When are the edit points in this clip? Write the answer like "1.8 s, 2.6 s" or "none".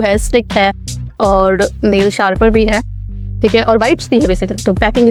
none